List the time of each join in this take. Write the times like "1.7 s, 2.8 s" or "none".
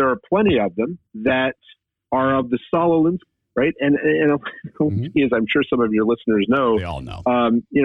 1.0 s, 3.3 s